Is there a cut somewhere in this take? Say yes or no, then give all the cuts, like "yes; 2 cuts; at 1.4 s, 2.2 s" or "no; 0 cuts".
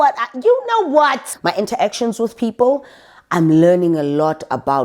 yes; 1 cut; at 1.3 s